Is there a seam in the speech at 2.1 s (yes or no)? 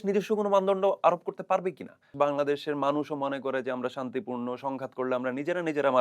yes